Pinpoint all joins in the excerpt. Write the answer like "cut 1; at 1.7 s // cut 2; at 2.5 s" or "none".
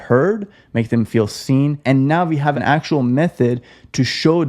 cut 1; at 1.8 s // cut 2; at 2.6 s